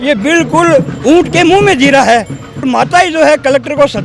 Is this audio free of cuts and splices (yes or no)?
no